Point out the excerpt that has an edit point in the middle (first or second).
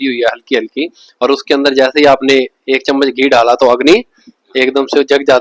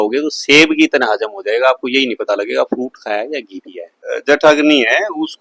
second